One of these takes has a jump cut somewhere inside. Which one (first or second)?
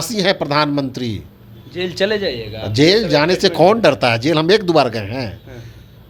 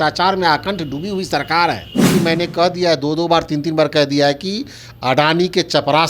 second